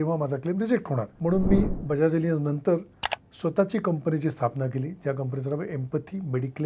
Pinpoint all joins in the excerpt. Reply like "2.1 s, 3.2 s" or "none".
1.1 s